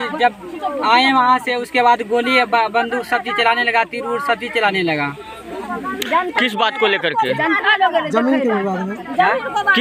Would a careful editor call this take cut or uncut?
uncut